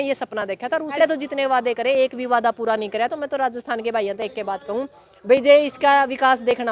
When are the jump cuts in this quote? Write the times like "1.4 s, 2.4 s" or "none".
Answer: 1.0 s